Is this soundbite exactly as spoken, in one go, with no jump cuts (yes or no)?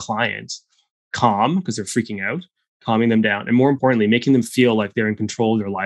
no